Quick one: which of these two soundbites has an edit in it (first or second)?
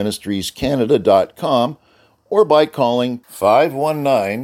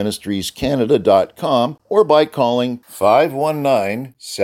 second